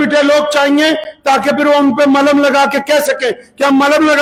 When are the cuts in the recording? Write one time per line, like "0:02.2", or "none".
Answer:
none

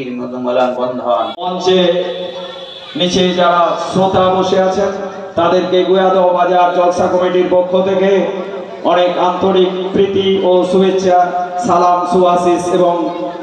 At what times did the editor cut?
0:01.3

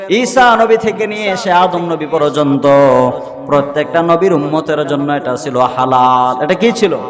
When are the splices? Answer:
none

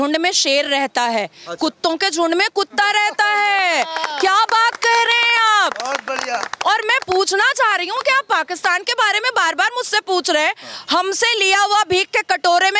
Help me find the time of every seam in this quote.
none

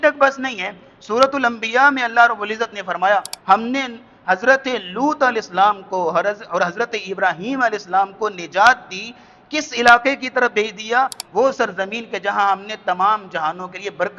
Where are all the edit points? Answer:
0:03.3
0:11.2

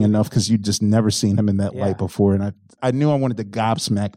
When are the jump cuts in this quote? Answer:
0:02.8

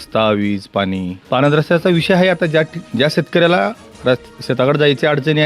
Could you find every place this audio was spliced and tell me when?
0:01.1

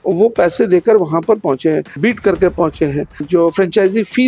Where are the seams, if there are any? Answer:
0:01.9
0:03.2

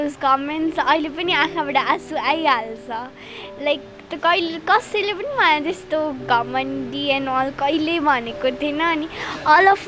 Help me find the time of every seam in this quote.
none

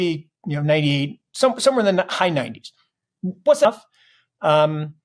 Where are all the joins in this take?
0:03.7

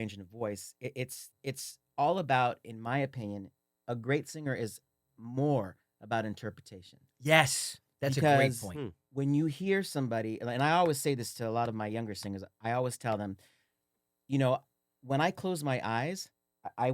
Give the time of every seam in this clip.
0:01.2

